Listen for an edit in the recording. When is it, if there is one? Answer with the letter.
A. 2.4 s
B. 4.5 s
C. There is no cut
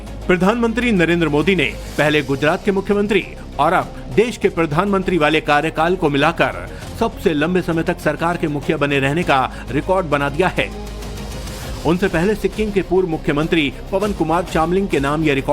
B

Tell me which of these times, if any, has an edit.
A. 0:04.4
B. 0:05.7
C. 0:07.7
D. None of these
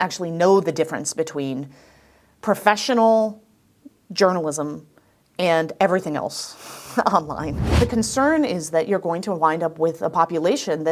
C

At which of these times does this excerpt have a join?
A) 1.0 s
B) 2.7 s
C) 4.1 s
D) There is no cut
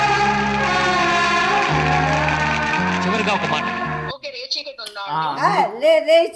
C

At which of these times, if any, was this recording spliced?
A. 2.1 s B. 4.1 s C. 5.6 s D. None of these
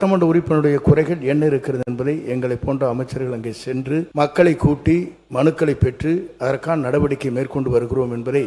B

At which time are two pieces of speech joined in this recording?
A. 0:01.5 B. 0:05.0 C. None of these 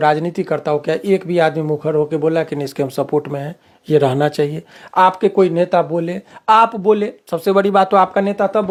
C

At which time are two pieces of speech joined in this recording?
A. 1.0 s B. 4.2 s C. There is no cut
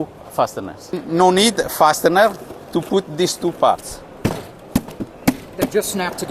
A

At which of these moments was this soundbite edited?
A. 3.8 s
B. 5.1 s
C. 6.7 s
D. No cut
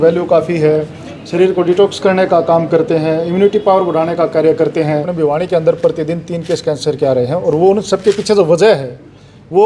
B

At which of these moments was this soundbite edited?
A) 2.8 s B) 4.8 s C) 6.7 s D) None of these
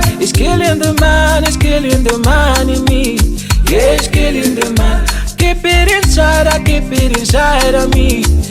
D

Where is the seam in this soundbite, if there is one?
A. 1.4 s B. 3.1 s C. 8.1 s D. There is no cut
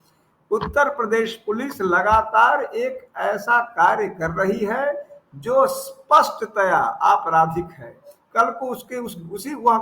C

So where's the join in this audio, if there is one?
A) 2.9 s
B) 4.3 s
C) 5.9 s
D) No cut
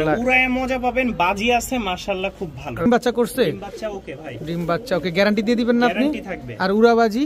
A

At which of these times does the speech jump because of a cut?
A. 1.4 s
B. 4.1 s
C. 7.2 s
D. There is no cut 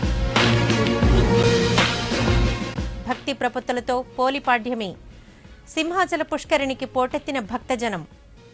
A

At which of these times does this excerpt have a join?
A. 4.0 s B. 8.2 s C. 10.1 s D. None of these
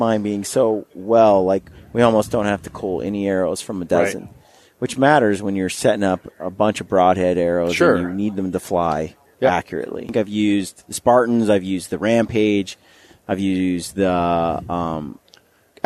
C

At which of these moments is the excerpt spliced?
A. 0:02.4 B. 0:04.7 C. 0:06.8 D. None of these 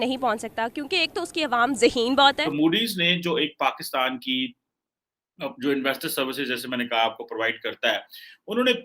A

